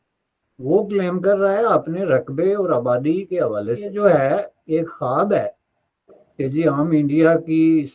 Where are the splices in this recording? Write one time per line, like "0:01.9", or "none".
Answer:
0:03.9